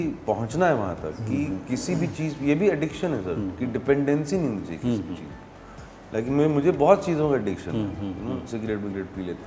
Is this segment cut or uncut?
uncut